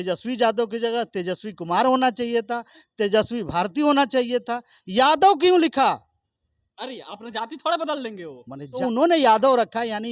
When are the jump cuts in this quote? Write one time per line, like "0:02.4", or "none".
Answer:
0:08.8